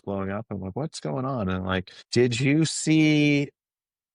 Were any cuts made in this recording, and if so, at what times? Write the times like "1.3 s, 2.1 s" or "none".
2.0 s

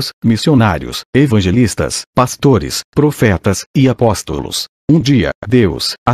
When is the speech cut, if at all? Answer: 3.6 s

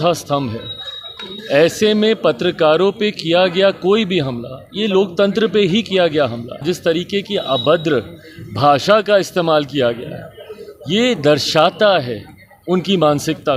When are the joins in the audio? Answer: 6.6 s

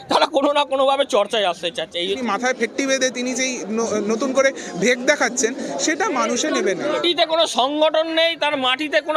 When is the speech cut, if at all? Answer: 2.0 s, 7.0 s

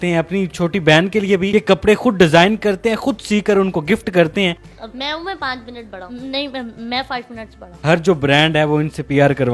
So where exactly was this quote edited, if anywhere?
4.5 s, 7.8 s

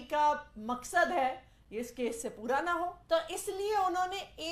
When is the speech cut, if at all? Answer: 3.0 s

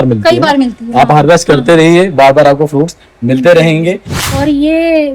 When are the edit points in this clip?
4.1 s

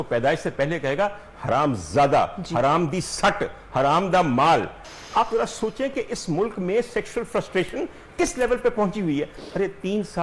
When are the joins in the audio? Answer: 4.8 s

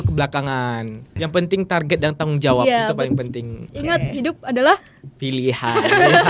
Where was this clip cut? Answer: 1.2 s

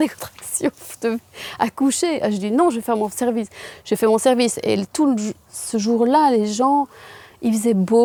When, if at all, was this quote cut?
none

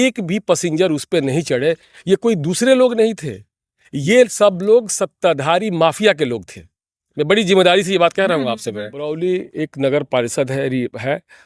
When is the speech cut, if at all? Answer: 9.0 s

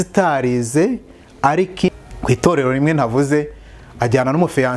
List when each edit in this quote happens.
1.9 s

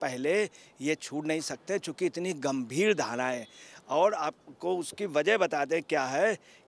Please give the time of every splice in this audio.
none

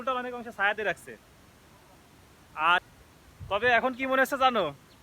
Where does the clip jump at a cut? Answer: 2.8 s

